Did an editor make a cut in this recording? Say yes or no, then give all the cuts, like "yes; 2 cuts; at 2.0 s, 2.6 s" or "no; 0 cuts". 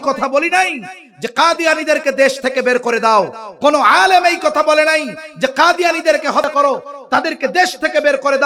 no; 0 cuts